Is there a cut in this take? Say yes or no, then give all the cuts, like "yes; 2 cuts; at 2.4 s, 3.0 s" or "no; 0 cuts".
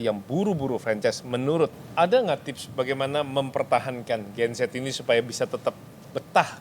yes; 1 cut; at 1.8 s